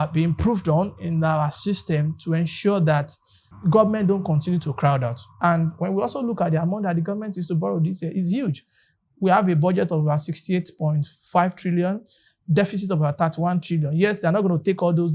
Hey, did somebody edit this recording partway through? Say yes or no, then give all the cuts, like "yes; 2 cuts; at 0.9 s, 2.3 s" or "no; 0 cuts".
yes; 1 cut; at 3.5 s